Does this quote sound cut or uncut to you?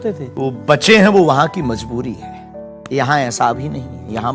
cut